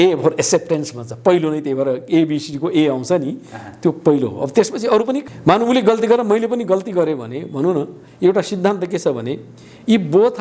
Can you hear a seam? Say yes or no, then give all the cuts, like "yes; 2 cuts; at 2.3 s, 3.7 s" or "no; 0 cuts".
yes; 1 cut; at 5.2 s